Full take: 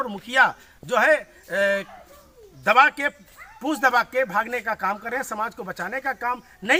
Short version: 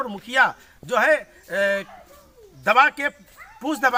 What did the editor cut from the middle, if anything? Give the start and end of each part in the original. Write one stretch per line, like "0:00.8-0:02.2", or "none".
none